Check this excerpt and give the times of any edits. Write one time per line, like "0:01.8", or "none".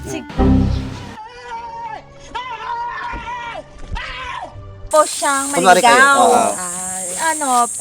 0:04.9

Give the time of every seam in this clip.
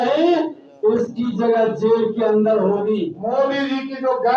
0:03.2

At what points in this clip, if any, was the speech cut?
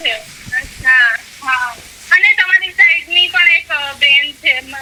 none

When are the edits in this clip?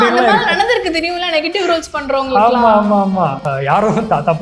0:03.4

